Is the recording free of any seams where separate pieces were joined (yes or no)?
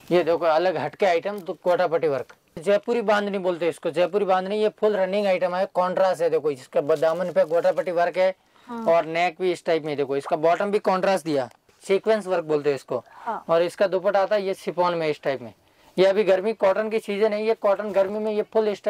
no